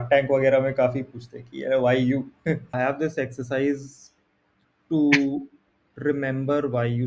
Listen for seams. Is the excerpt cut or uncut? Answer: cut